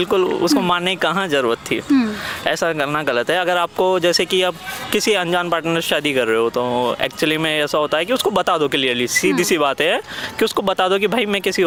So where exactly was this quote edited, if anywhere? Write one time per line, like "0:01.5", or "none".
none